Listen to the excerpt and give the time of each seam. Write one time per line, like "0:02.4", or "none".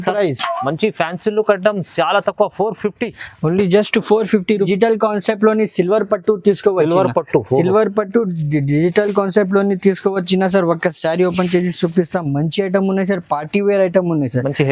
0:04.7